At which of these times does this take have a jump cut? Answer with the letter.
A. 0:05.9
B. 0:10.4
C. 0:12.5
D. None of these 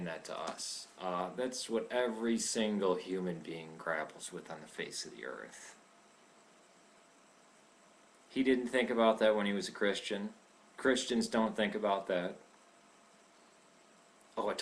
A